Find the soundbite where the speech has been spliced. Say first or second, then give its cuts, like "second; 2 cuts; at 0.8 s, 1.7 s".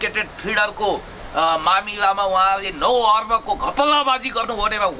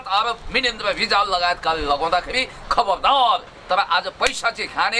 second; 1 cut; at 3.5 s